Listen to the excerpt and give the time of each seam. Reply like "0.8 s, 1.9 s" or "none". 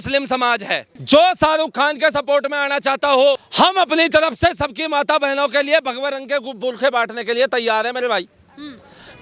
0.9 s, 3.5 s

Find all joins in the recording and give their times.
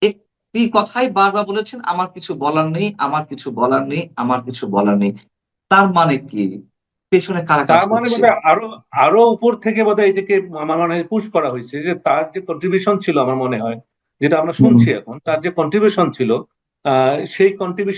none

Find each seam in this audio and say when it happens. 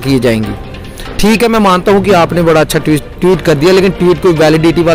none

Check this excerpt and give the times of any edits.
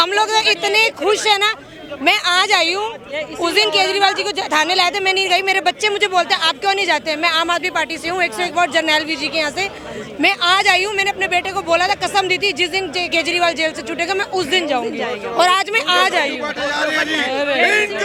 none

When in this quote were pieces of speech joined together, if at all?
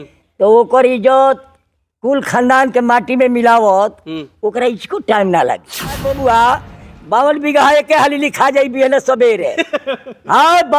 6.0 s

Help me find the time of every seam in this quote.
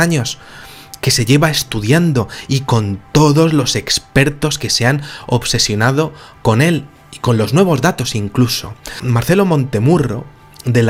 none

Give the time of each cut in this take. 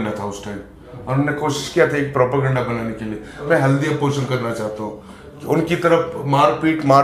3.4 s

